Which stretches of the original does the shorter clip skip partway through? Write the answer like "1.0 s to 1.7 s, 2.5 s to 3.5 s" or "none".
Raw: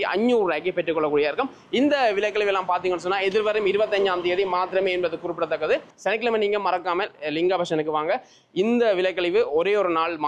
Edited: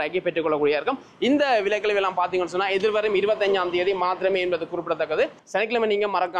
none